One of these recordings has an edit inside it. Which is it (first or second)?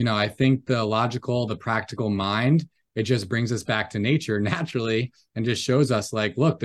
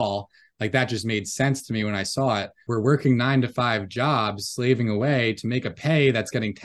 second